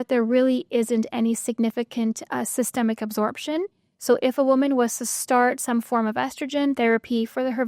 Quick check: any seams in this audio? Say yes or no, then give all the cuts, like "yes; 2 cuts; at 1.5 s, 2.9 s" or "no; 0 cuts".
yes; 1 cut; at 2.2 s